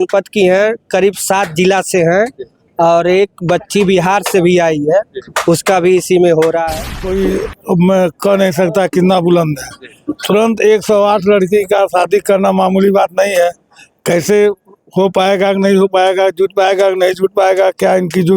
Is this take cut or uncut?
cut